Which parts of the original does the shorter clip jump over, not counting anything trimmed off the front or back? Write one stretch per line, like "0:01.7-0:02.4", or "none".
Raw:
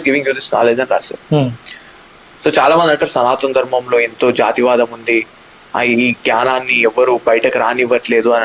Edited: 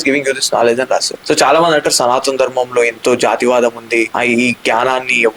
0:01.1-0:02.3
0:05.3-0:05.7

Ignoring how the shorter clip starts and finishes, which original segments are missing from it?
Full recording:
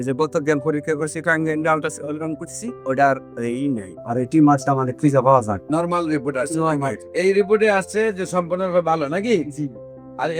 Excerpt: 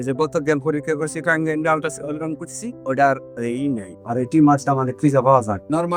none

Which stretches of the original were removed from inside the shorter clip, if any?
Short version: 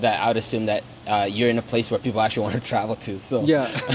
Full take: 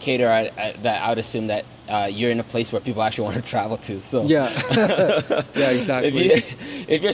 none

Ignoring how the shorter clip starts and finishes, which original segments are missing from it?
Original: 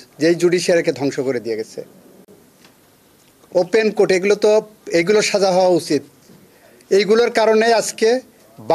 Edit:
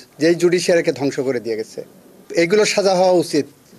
0:02.2-0:04.8

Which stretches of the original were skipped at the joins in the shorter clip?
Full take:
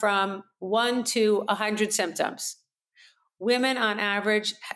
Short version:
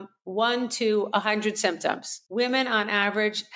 0:02.5-0:03.2

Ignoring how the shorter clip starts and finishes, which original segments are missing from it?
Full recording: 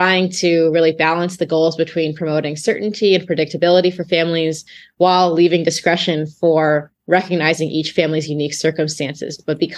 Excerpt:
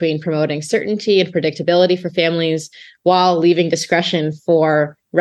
none

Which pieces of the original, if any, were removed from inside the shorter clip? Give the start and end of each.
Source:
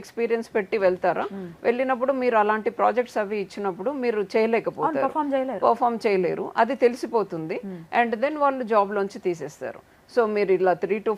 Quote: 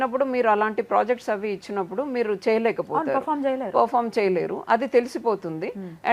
none

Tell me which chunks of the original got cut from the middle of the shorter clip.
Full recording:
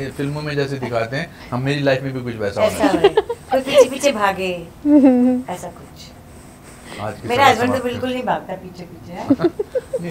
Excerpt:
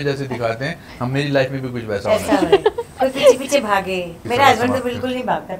0:04.7-0:07.1

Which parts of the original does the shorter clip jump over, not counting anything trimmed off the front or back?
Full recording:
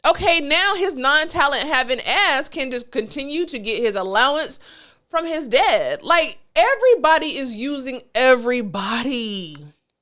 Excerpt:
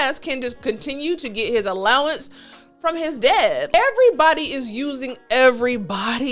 0:06.0-0:06.5

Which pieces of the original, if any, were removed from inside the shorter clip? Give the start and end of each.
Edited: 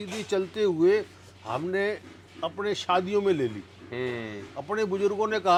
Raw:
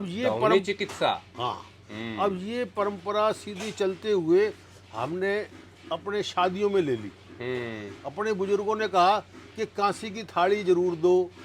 none

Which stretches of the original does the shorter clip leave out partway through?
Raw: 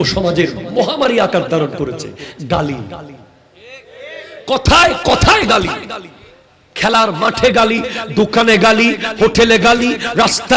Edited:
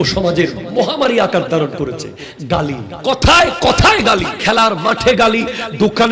0:02.9-0:04.4
0:05.8-0:06.7

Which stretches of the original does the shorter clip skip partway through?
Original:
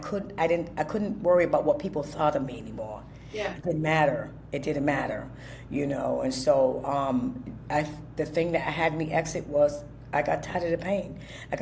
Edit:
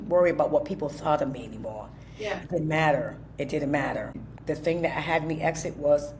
0:05.4-0:08.0

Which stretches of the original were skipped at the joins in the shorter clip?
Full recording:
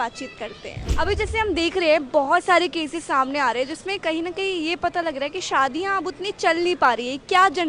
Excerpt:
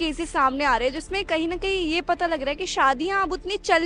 none

